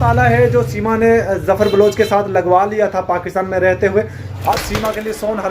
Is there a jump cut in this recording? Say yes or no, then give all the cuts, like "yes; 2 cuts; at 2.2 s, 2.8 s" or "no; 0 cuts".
yes; 1 cut; at 4.5 s